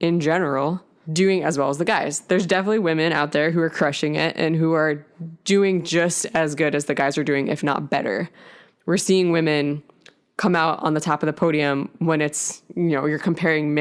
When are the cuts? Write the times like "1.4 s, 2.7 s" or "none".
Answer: none